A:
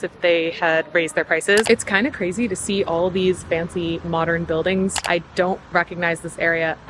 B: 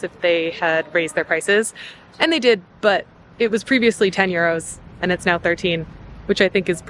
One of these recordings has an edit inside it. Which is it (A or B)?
A